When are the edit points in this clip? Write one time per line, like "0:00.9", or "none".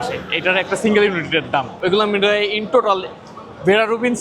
0:01.7